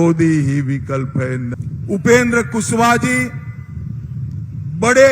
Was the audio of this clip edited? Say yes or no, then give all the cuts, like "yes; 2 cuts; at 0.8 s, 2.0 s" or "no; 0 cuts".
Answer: yes; 1 cut; at 1.5 s